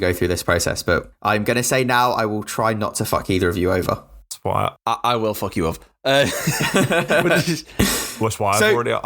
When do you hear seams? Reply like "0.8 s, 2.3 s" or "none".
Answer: 1.1 s, 4.5 s

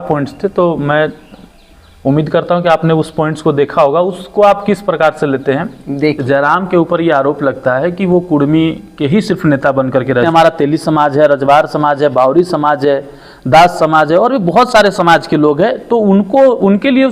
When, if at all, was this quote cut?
6.2 s, 10.3 s

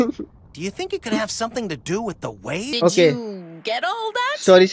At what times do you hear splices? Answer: 2.7 s

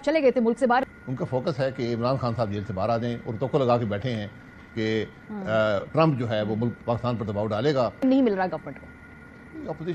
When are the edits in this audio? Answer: 0.8 s, 8.0 s

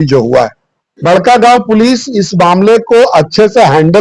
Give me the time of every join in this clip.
1.0 s

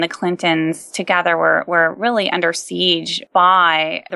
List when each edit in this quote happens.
none

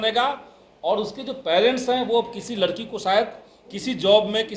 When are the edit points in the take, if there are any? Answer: none

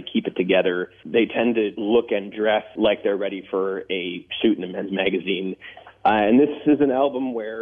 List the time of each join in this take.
0.9 s, 1.8 s, 2.7 s

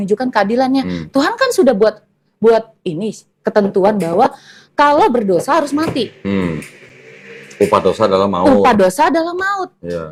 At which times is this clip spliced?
none

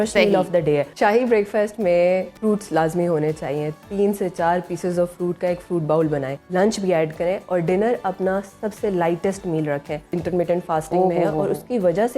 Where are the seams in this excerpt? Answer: 0.9 s, 2.3 s, 6.3 s, 10.1 s

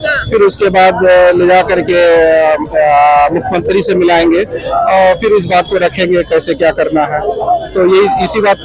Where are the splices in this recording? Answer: none

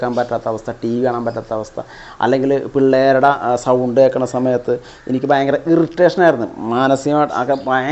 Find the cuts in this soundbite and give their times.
none

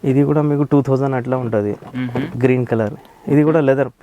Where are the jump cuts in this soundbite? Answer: 2.4 s

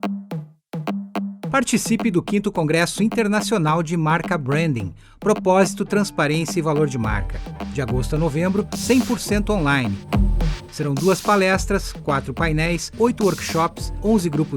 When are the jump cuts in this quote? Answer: 1.0 s

